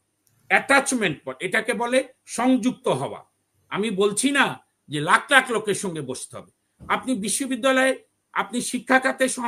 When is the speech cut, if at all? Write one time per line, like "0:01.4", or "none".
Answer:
none